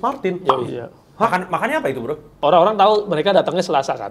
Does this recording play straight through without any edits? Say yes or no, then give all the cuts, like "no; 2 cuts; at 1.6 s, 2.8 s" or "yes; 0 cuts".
no; 1 cut; at 2.4 s